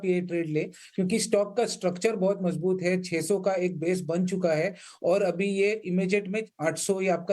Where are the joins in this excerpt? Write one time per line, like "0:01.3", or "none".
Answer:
none